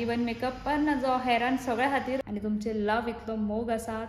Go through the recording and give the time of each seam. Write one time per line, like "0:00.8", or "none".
0:02.2